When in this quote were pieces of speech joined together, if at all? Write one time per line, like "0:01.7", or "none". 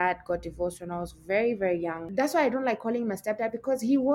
0:02.0